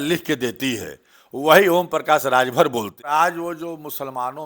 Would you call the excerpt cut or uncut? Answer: cut